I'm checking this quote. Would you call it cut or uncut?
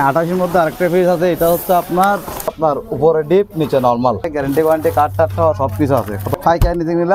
cut